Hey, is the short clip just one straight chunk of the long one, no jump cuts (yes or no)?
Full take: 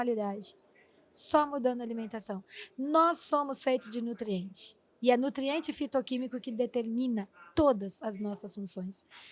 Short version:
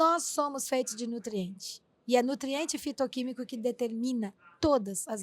yes